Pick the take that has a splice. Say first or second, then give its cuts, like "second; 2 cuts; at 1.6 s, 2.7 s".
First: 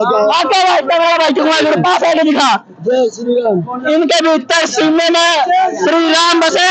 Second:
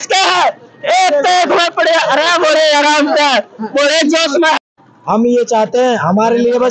second; 1 cut; at 4.8 s